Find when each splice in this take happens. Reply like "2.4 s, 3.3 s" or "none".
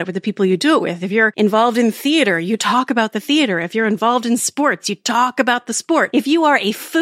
1.3 s, 6.1 s